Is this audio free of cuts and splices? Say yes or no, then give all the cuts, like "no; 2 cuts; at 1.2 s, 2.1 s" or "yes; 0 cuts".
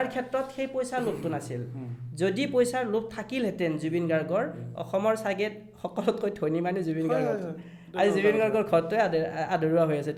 yes; 0 cuts